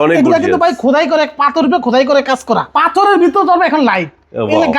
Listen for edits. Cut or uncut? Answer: cut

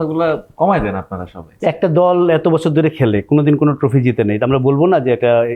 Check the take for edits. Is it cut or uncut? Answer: cut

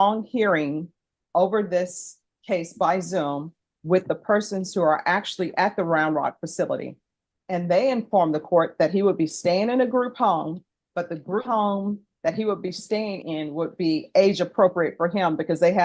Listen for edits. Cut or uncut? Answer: cut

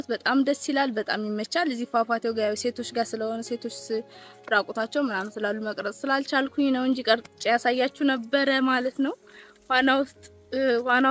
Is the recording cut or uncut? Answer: uncut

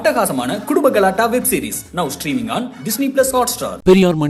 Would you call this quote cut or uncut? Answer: uncut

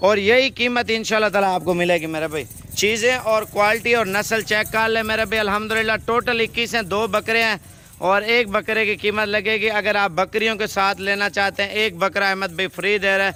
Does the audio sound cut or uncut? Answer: uncut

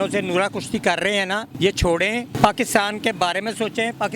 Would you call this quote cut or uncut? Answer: cut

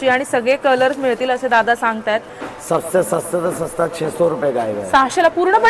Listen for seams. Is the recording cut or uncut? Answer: cut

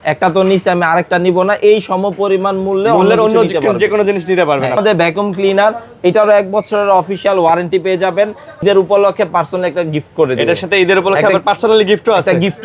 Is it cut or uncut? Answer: cut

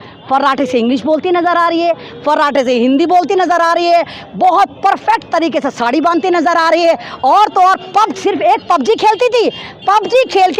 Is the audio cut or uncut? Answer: uncut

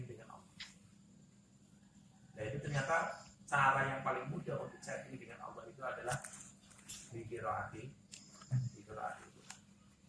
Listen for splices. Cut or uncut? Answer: uncut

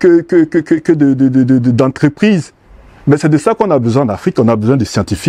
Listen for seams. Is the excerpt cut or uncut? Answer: uncut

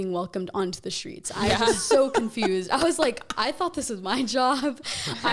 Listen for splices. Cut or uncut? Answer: uncut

